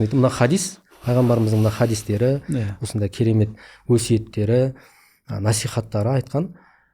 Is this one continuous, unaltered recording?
yes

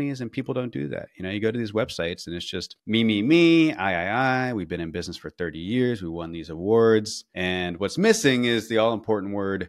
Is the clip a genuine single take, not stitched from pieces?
yes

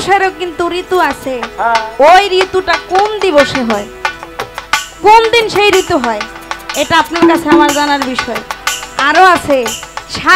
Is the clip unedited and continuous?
yes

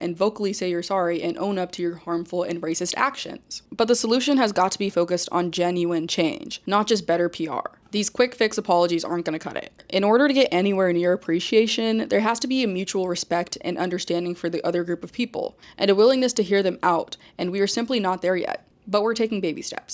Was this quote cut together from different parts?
no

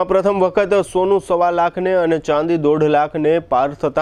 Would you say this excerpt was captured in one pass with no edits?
yes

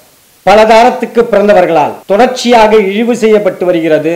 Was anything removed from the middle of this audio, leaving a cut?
yes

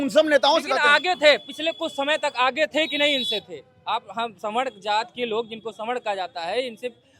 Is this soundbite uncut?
yes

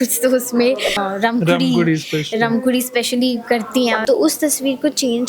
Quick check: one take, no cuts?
no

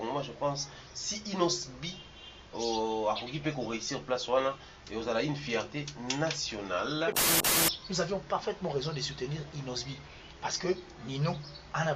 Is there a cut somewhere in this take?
yes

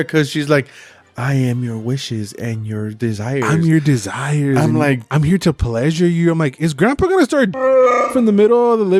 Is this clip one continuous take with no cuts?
yes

